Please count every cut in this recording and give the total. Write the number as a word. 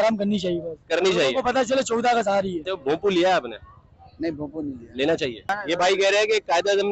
two